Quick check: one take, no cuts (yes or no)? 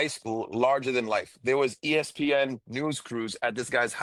yes